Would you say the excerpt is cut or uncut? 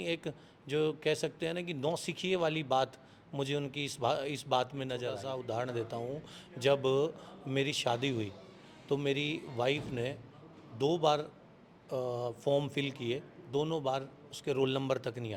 cut